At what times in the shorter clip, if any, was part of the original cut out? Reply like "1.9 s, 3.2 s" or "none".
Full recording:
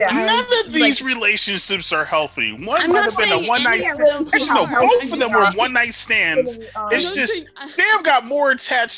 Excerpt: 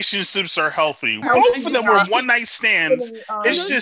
1.2 s

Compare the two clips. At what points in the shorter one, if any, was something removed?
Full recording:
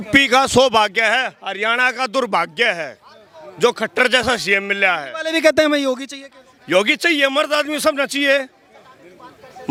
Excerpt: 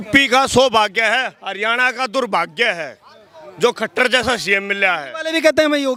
none

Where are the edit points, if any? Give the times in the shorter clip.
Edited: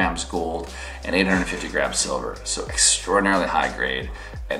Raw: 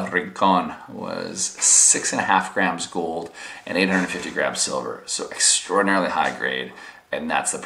none

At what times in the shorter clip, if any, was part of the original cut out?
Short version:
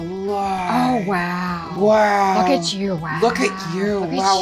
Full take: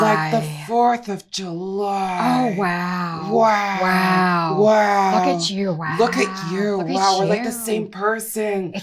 1.7 s

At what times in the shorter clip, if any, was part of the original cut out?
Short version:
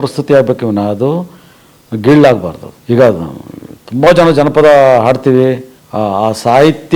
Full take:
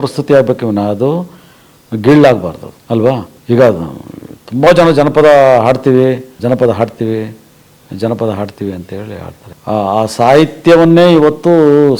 2.7 s, 5.7 s

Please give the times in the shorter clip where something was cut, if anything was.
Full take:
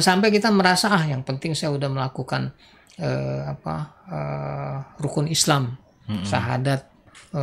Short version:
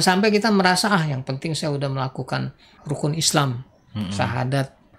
2.7 s

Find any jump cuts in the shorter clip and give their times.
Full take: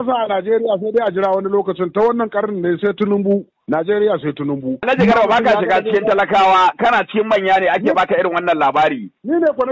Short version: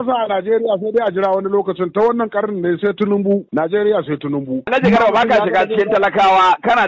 3.5 s

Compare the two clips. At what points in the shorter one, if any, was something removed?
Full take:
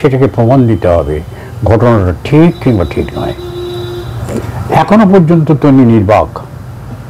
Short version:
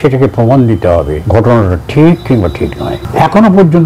1.2 s, 3.0 s

